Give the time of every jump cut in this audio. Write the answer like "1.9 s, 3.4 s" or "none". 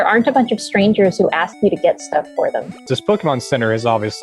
2.8 s